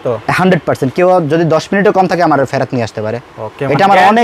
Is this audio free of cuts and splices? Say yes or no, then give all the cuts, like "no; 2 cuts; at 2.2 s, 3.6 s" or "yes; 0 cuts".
yes; 0 cuts